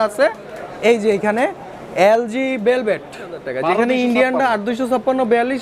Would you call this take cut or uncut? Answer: cut